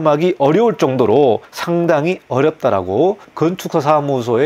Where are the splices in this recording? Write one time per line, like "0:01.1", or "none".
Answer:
0:01.5
0:03.3